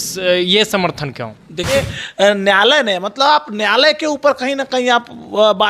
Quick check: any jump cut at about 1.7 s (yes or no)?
yes